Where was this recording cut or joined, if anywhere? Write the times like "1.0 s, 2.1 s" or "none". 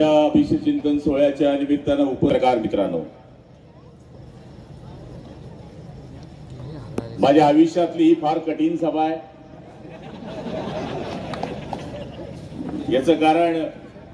2.3 s